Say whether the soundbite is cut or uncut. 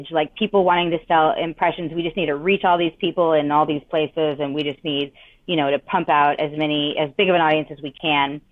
uncut